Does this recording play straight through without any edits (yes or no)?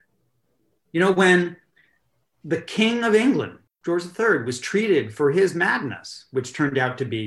no